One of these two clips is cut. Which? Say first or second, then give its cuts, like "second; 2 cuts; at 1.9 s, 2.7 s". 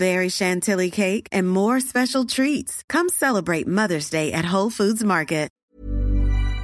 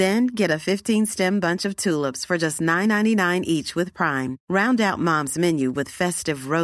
first; 1 cut; at 5.6 s